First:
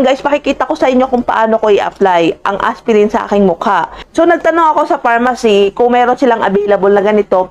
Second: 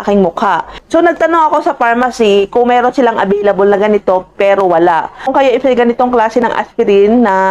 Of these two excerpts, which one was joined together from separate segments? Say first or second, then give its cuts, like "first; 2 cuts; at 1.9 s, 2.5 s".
second; 1 cut; at 5.2 s